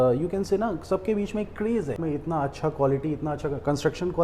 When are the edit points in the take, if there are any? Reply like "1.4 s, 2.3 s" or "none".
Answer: 2.0 s